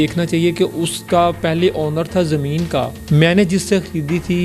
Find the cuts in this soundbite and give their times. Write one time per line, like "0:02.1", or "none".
0:01.0
0:03.0